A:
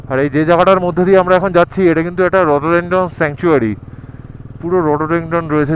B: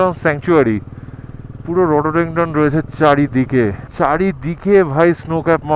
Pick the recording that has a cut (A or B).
B